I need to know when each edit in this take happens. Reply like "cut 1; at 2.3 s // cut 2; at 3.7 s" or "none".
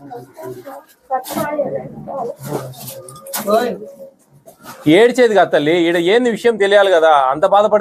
none